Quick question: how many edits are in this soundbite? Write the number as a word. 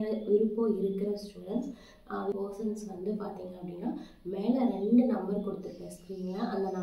one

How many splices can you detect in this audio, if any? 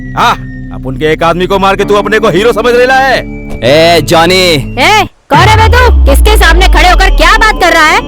one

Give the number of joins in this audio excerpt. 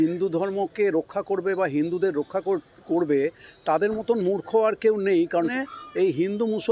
one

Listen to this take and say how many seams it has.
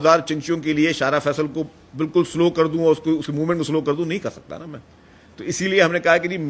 zero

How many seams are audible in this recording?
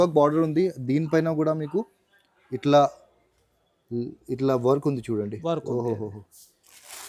zero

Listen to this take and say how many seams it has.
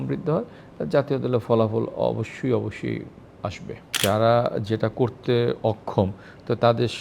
one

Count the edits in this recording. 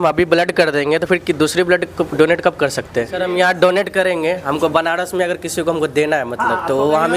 one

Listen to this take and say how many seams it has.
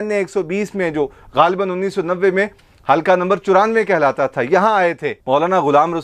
one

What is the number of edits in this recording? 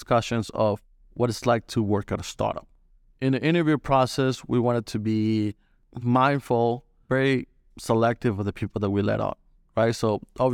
two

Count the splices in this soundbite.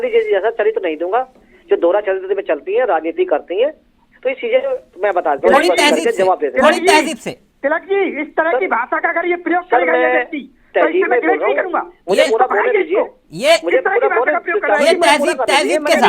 zero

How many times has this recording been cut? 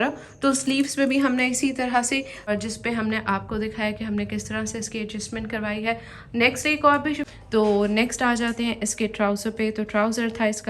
two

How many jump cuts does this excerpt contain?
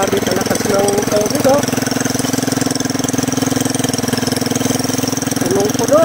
zero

